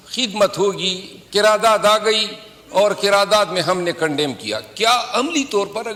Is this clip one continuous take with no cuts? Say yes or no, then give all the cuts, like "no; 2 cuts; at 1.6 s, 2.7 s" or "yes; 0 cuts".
yes; 0 cuts